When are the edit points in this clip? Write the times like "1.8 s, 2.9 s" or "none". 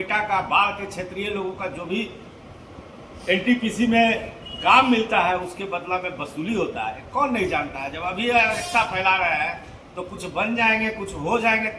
none